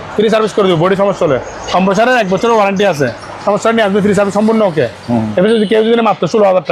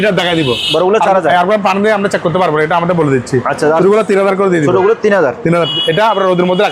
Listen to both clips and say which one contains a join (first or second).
second